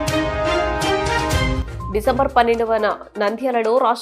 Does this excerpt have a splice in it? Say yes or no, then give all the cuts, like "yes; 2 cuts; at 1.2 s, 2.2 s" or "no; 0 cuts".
yes; 1 cut; at 1.6 s